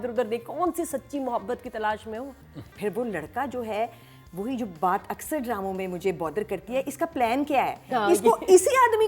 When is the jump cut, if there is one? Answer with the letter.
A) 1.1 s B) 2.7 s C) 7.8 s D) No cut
B